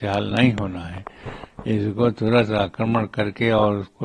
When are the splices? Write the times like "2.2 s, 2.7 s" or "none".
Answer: none